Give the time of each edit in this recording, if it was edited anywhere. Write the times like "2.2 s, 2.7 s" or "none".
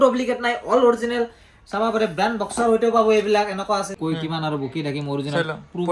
3.9 s